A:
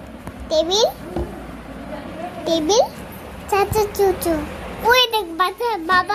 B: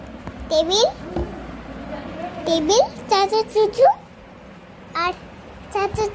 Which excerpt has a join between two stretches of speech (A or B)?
A